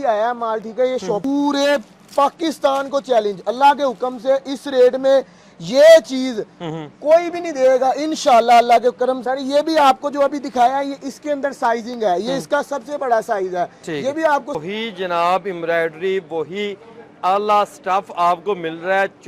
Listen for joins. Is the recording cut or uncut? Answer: cut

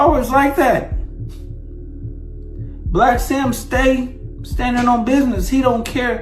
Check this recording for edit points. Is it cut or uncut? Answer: cut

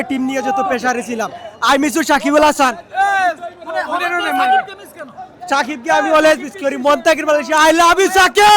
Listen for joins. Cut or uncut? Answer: uncut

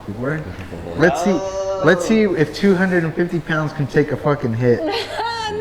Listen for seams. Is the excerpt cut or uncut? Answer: uncut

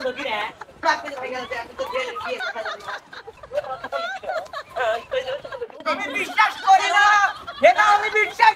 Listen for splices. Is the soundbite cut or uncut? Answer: cut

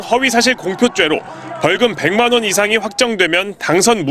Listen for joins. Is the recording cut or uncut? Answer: uncut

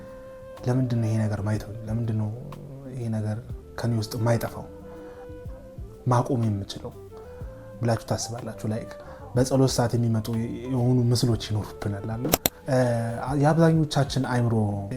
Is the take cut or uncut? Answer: cut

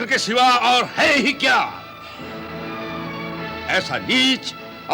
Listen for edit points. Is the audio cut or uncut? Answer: uncut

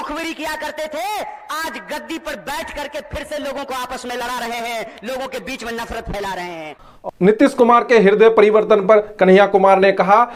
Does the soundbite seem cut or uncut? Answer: uncut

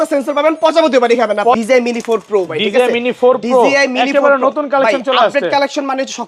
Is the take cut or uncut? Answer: cut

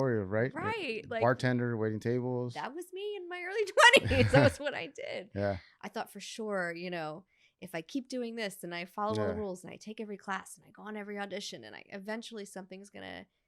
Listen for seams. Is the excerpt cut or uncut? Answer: cut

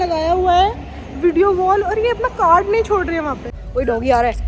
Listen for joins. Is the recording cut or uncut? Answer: cut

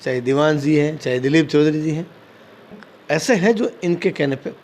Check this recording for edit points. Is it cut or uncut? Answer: cut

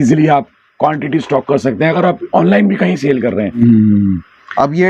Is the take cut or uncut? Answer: cut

